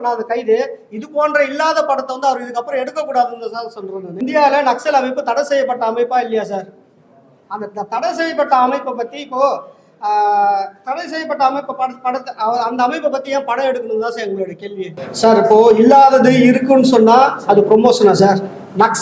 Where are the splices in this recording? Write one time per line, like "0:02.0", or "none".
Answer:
0:04.2
0:15.0